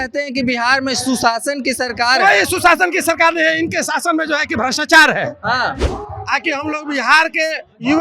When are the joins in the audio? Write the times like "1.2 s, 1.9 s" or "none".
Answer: 5.8 s